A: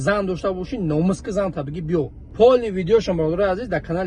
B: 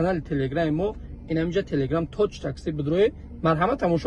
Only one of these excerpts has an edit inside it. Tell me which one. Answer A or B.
A